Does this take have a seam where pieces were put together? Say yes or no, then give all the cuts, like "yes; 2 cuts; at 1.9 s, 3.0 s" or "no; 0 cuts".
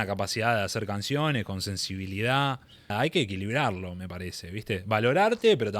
yes; 1 cut; at 2.9 s